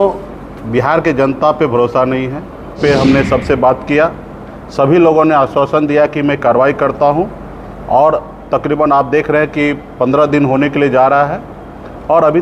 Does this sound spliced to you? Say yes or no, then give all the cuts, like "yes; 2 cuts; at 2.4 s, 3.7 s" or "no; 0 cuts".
yes; 1 cut; at 2.8 s